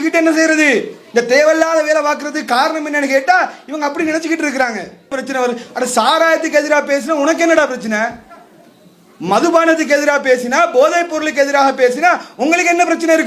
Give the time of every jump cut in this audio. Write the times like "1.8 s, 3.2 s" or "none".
5.2 s